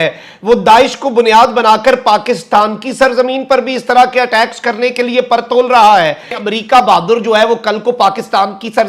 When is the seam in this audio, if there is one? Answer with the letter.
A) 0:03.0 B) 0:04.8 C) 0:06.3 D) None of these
C